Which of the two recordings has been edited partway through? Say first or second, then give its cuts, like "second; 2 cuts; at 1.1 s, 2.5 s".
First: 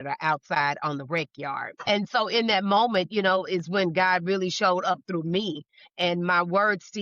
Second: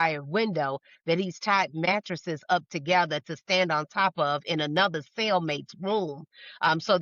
first; 1 cut; at 1.8 s